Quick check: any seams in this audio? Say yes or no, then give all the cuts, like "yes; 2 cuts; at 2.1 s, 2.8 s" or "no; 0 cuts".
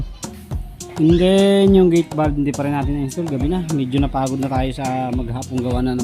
no; 0 cuts